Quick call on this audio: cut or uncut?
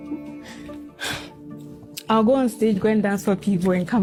uncut